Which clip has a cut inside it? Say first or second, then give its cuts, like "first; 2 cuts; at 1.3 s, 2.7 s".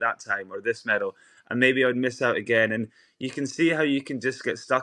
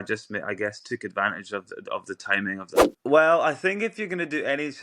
second; 1 cut; at 2.9 s